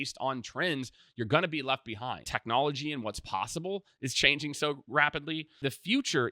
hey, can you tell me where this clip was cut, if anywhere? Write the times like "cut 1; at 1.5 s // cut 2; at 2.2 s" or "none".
cut 1; at 2.3 s // cut 2; at 5.6 s